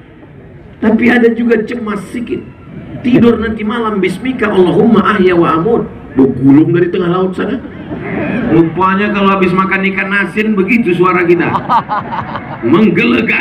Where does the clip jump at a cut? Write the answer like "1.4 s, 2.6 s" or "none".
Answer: 8.5 s